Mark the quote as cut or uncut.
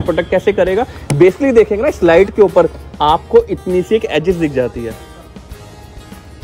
uncut